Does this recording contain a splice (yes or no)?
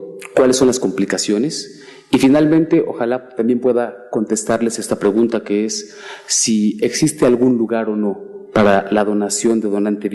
yes